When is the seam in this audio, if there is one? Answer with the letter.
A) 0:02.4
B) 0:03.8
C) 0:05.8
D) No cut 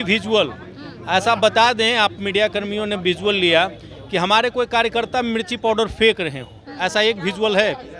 D